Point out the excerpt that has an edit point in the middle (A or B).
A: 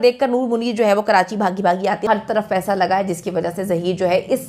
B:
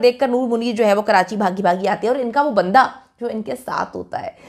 A